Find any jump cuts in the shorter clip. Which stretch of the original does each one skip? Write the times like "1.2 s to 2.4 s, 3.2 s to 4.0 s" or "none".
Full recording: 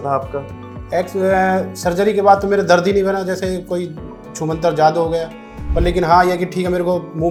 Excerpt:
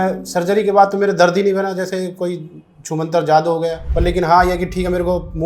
5.3 s to 5.6 s